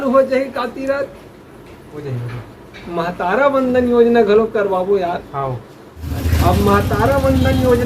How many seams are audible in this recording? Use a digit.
1